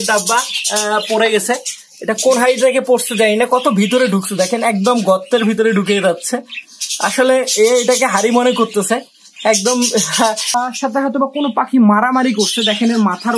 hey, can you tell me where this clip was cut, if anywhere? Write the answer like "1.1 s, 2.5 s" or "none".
10.5 s